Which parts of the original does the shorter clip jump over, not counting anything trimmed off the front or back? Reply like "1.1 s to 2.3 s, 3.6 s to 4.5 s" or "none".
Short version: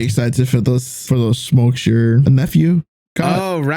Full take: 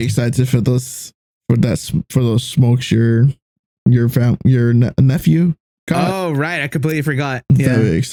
1.0 s to 2.1 s, 3.3 s to 4.9 s

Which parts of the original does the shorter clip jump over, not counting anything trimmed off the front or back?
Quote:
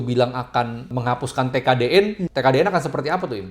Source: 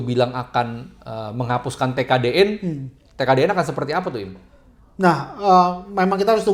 0.9 s to 1.3 s, 2.7 s to 3.1 s

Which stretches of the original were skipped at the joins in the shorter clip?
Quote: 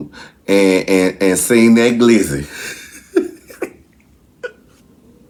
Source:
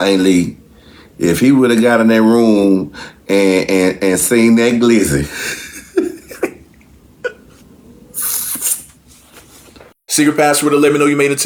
none

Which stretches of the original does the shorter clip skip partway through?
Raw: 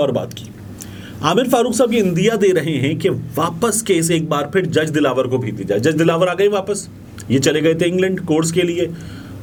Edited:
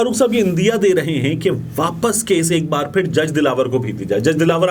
none

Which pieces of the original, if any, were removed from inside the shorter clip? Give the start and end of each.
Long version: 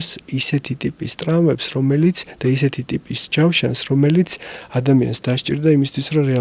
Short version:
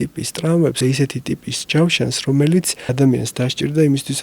1.6 s to 2.4 s, 4.4 s to 4.7 s

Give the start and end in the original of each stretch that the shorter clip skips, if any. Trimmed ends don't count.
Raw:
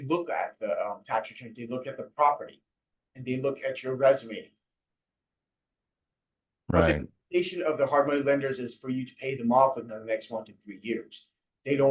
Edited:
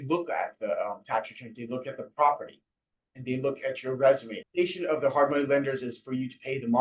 4.4 s to 7.1 s

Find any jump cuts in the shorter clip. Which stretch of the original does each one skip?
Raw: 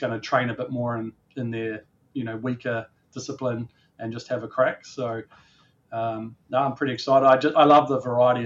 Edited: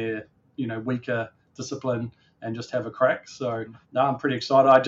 5.3 s to 6.3 s

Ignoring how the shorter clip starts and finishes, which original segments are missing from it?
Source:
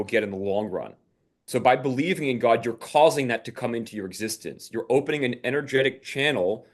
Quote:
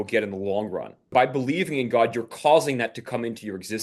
1.1 s to 1.6 s

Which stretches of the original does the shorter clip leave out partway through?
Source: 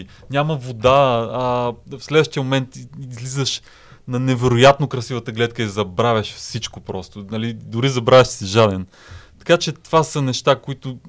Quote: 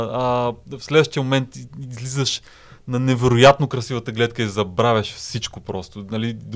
none

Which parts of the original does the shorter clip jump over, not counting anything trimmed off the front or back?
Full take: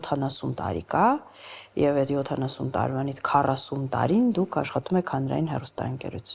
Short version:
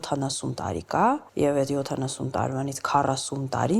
1.3 s to 1.7 s

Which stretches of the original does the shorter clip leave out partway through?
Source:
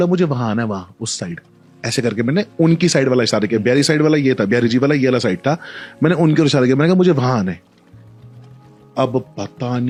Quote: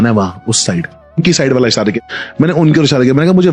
1.7 s to 2.8 s, 3.6 s to 5.6 s

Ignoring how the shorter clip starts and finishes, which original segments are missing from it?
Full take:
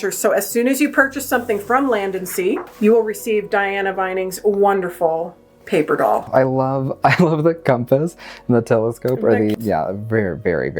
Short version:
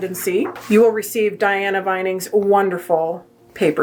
none

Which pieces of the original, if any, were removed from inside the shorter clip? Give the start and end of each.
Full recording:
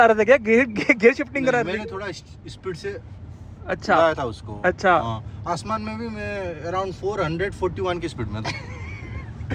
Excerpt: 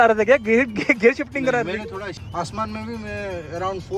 2.2 s to 5.3 s

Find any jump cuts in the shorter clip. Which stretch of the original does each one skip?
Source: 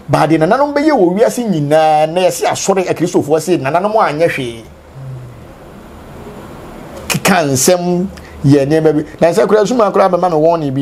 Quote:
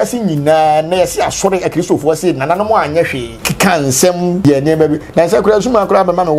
4.6 s to 7.0 s, 8.1 s to 8.5 s

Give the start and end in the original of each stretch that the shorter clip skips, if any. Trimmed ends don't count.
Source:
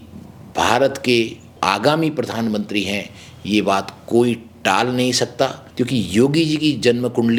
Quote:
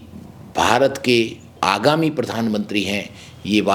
none

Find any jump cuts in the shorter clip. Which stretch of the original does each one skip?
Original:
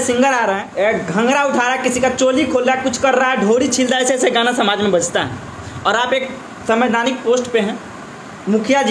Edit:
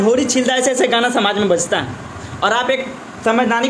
none

